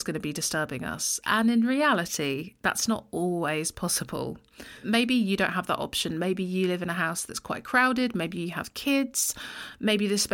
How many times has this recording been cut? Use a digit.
1